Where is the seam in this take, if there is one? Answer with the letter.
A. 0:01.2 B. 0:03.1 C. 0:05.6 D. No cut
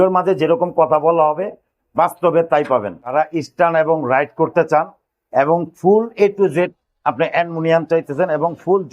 B